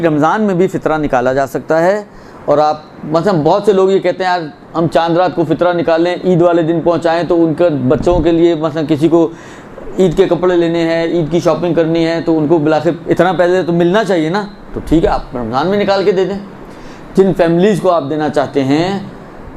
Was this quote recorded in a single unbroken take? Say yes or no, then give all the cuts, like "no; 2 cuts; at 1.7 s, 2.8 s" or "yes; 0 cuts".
no; 1 cut; at 11.6 s